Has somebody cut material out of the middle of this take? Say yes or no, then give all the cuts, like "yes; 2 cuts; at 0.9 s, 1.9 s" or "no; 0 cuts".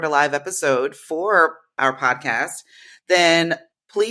no; 0 cuts